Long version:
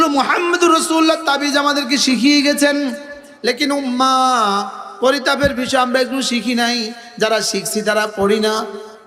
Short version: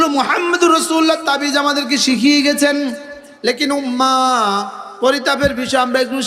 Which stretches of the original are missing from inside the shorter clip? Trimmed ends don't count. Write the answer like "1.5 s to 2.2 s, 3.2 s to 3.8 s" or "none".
none